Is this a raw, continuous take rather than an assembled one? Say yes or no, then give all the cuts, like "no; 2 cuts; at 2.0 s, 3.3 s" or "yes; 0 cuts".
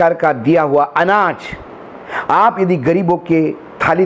yes; 0 cuts